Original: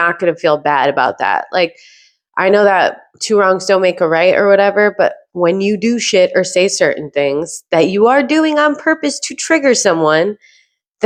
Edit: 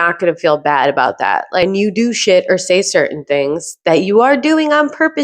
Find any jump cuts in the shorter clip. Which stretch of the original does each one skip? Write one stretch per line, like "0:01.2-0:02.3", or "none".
0:01.7-0:05.5